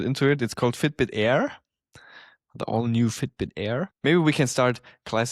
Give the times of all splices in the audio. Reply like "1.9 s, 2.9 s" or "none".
3.9 s